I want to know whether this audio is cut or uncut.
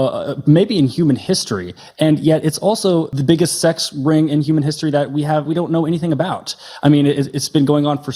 cut